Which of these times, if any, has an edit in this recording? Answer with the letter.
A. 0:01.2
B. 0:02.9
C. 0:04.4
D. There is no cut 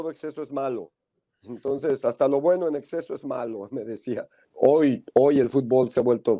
C